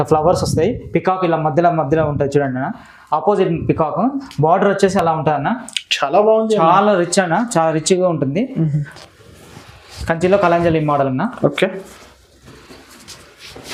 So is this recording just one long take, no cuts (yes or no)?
yes